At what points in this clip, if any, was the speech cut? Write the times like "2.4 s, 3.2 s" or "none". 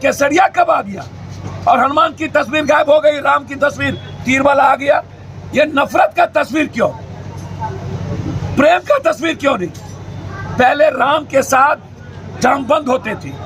none